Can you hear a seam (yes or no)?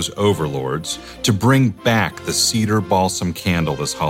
no